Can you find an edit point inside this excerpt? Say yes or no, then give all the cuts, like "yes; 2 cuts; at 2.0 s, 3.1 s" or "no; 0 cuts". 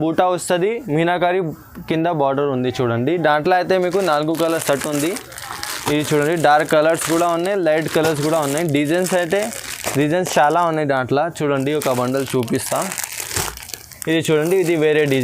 no; 0 cuts